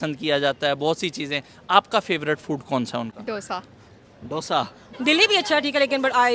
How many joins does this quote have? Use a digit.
1